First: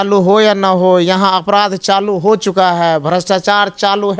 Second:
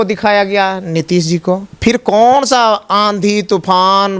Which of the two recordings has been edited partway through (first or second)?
second